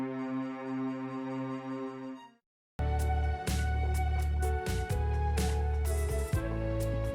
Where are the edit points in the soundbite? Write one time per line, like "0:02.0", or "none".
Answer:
0:02.8